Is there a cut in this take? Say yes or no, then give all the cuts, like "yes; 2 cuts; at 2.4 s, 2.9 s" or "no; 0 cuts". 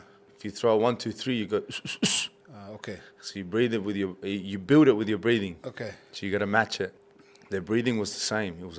yes; 1 cut; at 7.0 s